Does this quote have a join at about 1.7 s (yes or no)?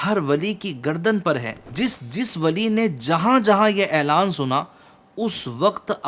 yes